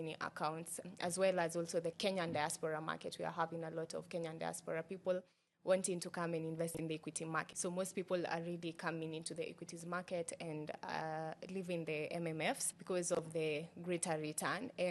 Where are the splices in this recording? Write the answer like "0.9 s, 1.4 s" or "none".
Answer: 7.5 s